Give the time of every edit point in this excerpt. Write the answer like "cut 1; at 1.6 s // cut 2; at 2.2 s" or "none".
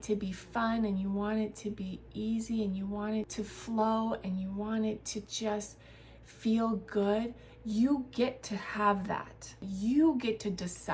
cut 1; at 3.3 s // cut 2; at 9.7 s